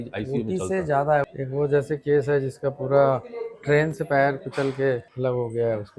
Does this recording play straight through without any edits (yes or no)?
no